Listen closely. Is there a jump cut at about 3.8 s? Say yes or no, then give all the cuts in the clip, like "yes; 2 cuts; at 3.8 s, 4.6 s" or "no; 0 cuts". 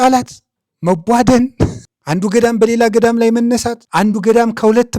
yes; 2 cuts; at 1.8 s, 3.8 s